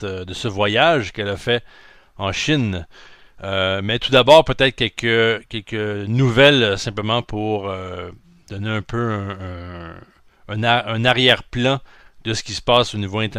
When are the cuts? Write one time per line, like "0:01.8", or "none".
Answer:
none